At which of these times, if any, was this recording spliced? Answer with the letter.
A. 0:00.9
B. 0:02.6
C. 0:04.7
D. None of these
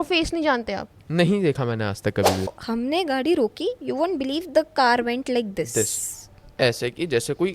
B